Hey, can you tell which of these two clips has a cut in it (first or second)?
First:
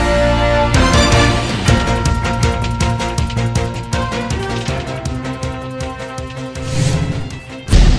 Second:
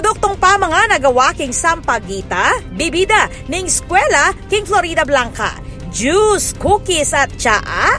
first